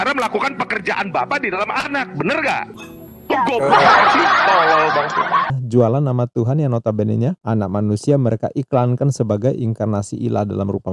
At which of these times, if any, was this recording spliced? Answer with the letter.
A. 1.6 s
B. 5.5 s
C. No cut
B